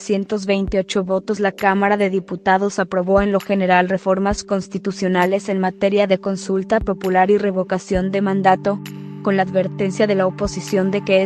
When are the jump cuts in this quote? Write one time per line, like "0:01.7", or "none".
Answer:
none